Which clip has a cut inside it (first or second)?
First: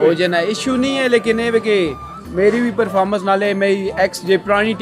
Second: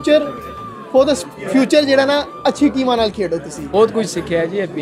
second